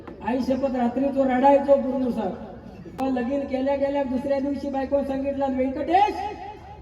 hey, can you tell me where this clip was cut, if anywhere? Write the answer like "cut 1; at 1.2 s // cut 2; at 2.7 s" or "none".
cut 1; at 3.0 s

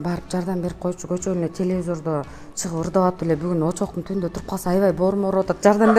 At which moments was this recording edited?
none

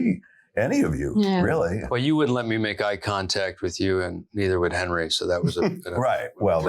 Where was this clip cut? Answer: cut 1; at 1.8 s

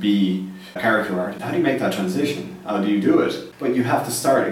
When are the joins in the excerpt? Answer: cut 1; at 1.1 s // cut 2; at 3.5 s

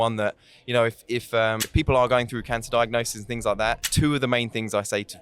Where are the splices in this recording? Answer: cut 1; at 1.6 s // cut 2; at 3.9 s

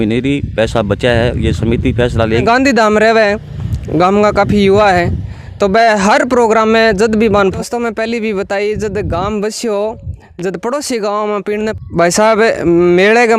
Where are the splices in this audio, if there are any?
cut 1; at 2.4 s // cut 2; at 7.5 s // cut 3; at 11.8 s

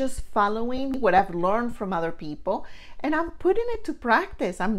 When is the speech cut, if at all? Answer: cut 1; at 1.0 s

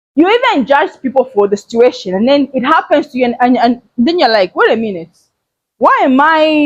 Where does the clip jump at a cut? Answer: none

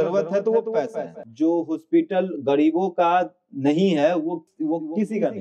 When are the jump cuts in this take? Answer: cut 1; at 1.2 s // cut 2; at 4.5 s

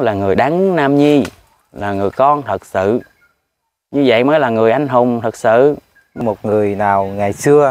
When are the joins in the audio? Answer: cut 1; at 6.2 s

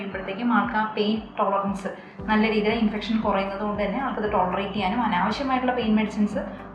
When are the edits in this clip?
none

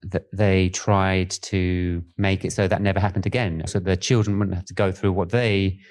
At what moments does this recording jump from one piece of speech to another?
cut 1; at 2.1 s // cut 2; at 3.7 s

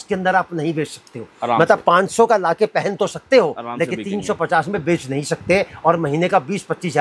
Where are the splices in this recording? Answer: none

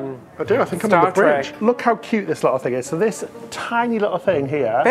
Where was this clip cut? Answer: cut 1; at 1.5 s

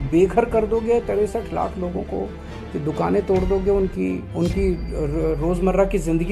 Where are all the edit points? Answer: cut 1; at 4.3 s

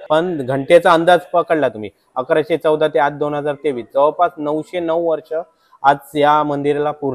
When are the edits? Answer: none

